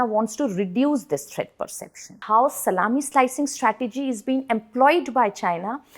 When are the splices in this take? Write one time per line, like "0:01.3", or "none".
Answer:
0:02.2

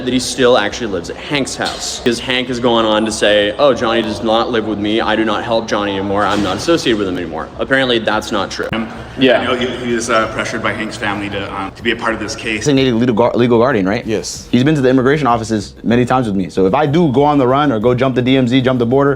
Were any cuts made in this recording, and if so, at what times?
0:02.0
0:08.7
0:12.6

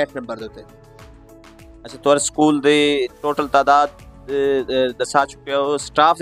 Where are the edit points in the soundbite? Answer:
none

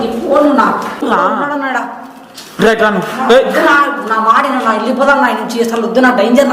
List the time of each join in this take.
0:01.0

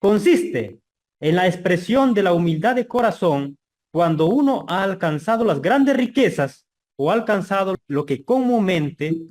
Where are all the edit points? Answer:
0:07.8

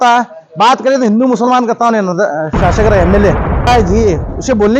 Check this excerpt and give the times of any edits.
0:03.7

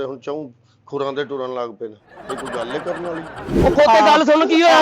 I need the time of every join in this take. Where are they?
0:03.5

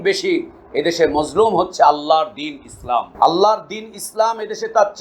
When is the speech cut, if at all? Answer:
0:03.1

